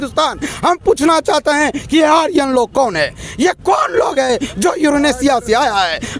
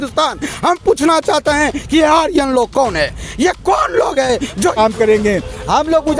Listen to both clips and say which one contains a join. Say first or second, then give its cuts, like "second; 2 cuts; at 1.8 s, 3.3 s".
second; 1 cut; at 4.8 s